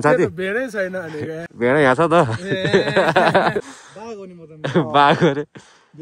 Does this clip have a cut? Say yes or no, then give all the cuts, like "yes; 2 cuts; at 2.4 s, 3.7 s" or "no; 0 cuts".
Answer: yes; 2 cuts; at 1.4 s, 3.8 s